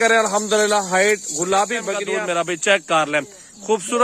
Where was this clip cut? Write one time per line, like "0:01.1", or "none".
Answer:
0:02.0